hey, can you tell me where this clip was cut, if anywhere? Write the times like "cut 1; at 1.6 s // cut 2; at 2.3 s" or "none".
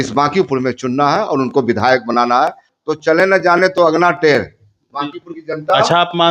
cut 1; at 2.6 s